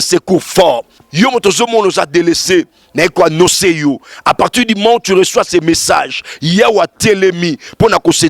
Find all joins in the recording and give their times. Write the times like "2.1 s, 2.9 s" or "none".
1.0 s